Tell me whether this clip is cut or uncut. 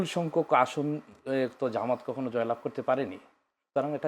uncut